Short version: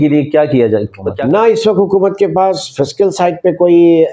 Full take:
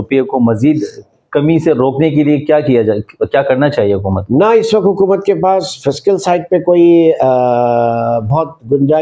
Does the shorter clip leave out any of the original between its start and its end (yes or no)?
yes